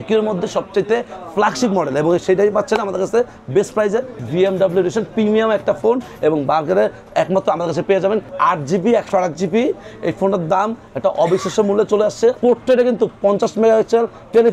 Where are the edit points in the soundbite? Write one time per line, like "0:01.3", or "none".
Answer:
0:04.2
0:08.3
0:12.4